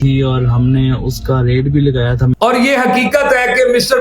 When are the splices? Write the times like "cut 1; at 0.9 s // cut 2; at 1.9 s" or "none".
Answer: cut 1; at 2.3 s

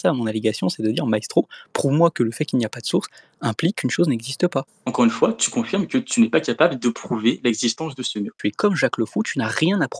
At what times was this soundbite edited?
cut 1; at 4.7 s // cut 2; at 8.4 s

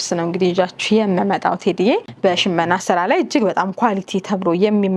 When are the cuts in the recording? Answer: cut 1; at 2.1 s

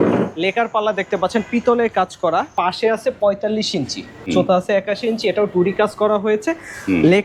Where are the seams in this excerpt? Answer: cut 1; at 2.5 s // cut 2; at 4.3 s

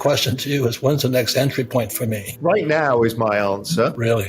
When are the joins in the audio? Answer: cut 1; at 2.3 s

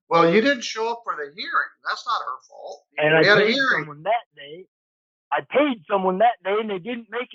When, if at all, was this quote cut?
none

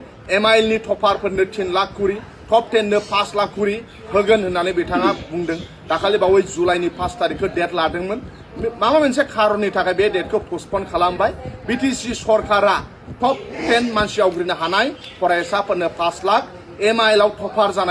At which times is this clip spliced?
none

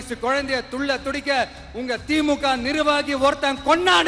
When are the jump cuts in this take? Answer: none

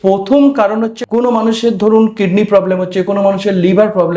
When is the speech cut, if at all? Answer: cut 1; at 1.0 s

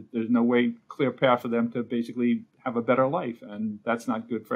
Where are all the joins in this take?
none

